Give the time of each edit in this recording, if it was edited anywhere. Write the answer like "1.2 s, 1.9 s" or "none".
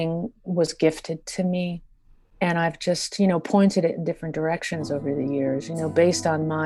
none